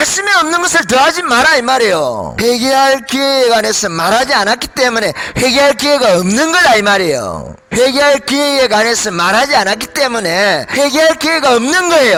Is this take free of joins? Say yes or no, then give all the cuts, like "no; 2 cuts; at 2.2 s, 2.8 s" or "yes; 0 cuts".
yes; 0 cuts